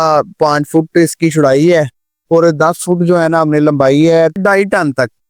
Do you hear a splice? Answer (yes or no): yes